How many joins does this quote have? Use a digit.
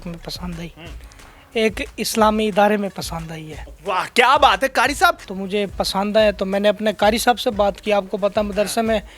1